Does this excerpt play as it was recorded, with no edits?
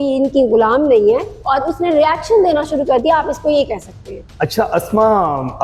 yes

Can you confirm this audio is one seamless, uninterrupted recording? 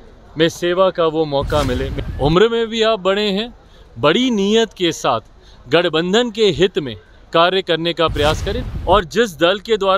no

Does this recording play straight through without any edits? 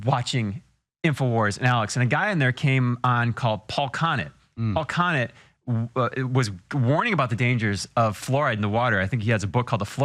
yes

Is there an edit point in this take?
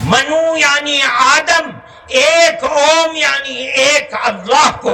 no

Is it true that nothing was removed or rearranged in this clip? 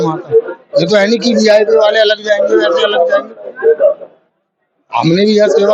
yes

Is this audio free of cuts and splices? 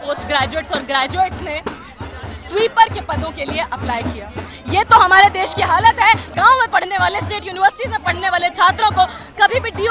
no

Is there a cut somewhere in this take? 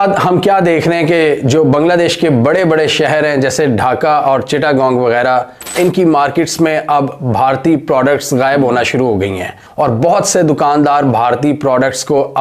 no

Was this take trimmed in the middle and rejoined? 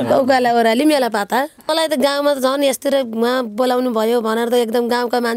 yes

